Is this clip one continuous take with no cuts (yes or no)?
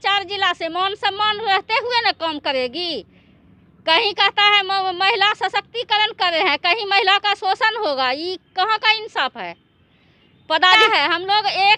yes